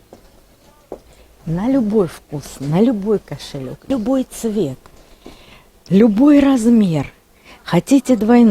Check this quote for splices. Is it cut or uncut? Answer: cut